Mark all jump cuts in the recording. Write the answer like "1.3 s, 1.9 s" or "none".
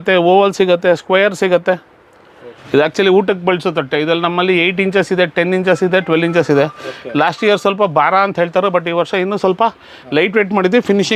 none